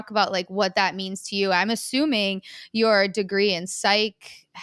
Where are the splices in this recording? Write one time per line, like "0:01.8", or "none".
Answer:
none